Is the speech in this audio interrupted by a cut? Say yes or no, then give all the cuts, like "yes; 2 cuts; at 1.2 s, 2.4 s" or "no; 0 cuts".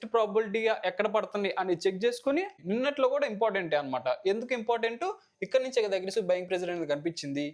yes; 1 cut; at 2.5 s